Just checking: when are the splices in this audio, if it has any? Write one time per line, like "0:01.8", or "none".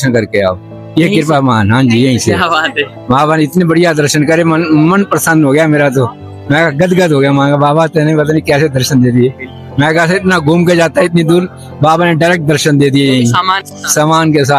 none